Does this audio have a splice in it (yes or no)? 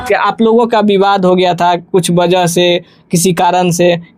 no